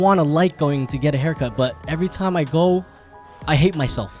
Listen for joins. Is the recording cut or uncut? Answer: uncut